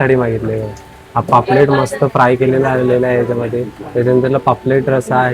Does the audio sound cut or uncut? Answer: uncut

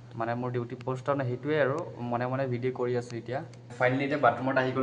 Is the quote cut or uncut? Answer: cut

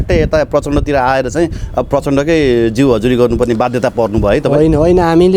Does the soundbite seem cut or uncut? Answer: uncut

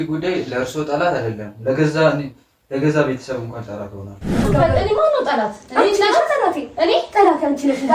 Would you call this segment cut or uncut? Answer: cut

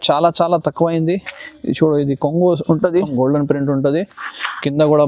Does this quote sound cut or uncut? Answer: cut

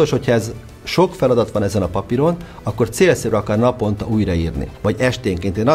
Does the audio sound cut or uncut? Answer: cut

